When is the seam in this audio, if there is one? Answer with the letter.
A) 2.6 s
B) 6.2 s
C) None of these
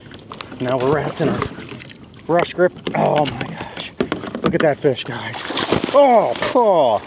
B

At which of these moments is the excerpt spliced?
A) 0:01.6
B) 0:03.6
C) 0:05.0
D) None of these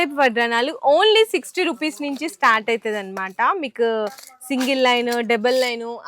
D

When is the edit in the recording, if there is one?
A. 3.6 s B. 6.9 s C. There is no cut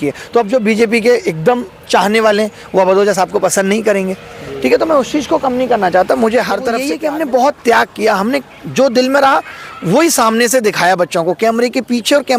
B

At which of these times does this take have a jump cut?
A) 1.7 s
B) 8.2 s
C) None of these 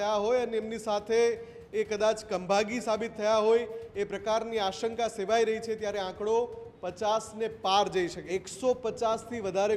B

